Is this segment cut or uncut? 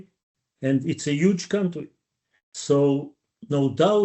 uncut